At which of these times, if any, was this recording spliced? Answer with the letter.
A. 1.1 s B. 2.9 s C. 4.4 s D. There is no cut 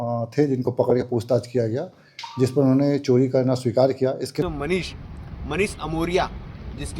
C